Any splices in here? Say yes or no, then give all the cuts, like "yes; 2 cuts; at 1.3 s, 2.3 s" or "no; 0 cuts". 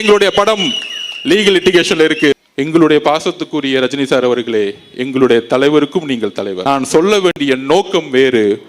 yes; 2 cuts; at 2.3 s, 6.5 s